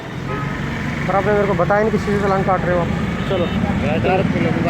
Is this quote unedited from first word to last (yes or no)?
yes